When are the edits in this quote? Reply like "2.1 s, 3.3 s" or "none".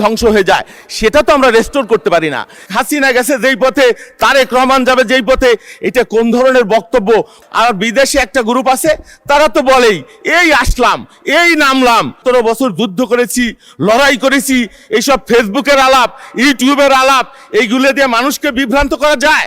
2.7 s, 7.4 s, 12.2 s